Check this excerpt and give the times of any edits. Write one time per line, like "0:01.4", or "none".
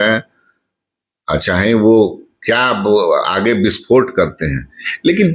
none